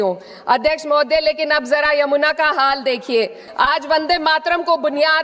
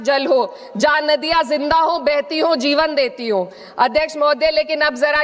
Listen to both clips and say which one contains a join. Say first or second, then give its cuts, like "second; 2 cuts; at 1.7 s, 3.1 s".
first; 1 cut; at 3.4 s